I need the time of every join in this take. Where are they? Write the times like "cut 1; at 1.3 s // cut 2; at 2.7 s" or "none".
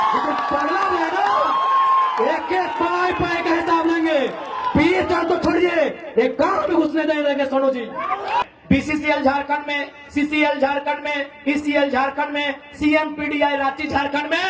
cut 1; at 8.4 s